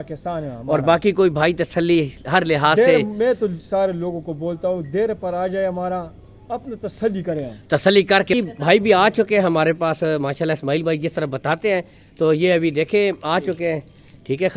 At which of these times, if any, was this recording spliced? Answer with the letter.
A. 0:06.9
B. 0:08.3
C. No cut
B